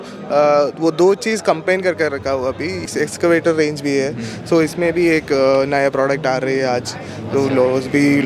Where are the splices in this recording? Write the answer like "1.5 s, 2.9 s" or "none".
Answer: 2.8 s